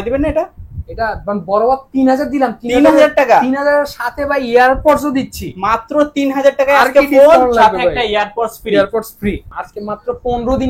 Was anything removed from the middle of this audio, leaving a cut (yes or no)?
yes